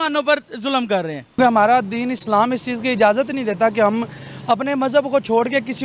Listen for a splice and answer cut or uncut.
cut